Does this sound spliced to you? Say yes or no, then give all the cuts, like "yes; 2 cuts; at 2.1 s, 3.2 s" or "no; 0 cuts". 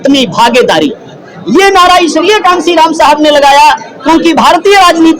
no; 0 cuts